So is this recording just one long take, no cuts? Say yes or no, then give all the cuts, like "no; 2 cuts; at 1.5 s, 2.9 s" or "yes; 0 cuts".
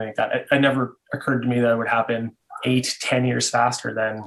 no; 1 cut; at 2.4 s